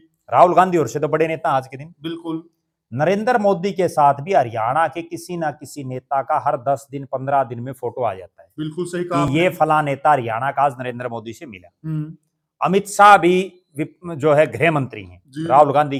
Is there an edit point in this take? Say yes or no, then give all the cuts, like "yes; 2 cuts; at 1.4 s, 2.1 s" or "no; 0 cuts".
no; 0 cuts